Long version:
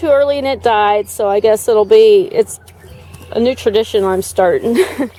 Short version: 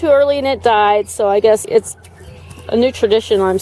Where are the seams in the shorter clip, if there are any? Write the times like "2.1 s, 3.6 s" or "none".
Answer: 1.6 s